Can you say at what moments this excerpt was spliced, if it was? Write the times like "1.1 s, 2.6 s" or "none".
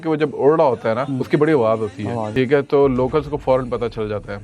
1.1 s, 2.2 s